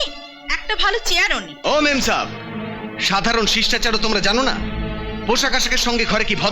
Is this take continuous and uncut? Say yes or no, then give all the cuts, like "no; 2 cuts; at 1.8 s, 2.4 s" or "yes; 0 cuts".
no; 1 cut; at 1.5 s